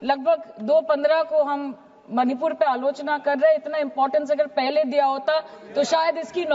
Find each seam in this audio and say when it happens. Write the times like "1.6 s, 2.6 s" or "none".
none